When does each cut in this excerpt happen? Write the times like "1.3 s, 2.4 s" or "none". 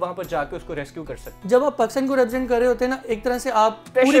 1.3 s